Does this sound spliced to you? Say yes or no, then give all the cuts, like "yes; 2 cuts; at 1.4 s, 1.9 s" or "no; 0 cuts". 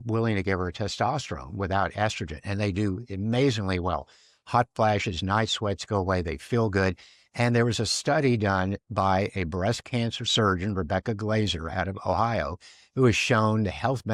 no; 0 cuts